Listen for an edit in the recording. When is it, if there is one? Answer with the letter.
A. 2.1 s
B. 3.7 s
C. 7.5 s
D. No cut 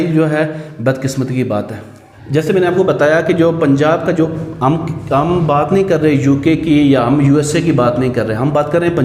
D